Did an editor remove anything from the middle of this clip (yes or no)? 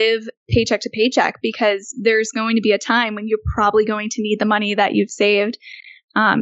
no